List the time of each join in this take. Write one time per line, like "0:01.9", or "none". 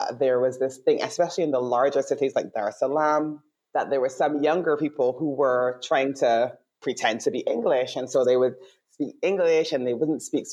none